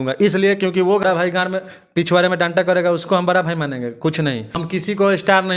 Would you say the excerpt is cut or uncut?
cut